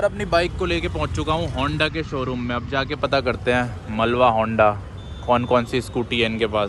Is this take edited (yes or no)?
no